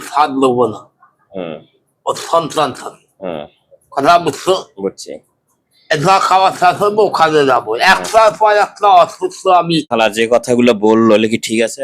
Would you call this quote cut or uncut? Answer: cut